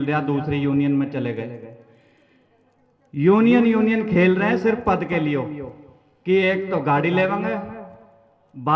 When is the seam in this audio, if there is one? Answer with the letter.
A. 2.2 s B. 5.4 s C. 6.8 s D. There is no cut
D